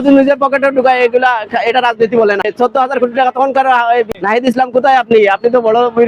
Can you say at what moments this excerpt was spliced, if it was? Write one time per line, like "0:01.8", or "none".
0:02.5
0:04.1